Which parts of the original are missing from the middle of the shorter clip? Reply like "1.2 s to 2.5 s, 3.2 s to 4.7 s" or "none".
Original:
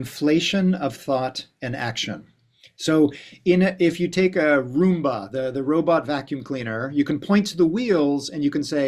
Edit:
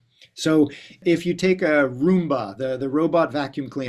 3.4 s to 3.7 s